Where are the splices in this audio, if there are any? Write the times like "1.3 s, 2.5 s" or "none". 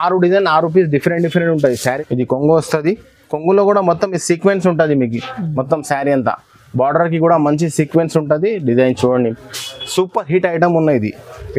2.0 s